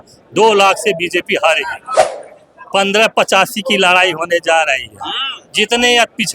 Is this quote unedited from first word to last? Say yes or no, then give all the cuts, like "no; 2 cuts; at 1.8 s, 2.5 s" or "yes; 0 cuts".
no; 1 cut; at 2.1 s